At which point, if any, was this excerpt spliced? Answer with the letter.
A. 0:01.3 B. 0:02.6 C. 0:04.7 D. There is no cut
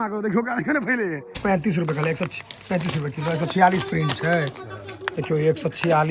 A